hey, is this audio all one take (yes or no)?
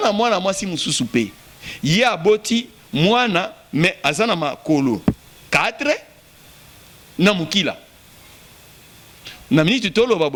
yes